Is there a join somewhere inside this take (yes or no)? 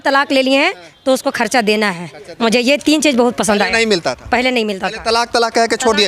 no